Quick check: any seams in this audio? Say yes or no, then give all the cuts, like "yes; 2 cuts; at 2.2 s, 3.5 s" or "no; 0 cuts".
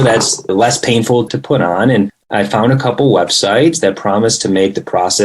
yes; 2 cuts; at 1.3 s, 2.2 s